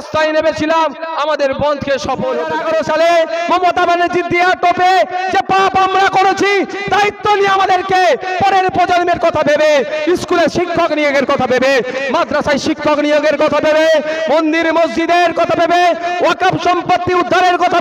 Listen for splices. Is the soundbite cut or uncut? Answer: cut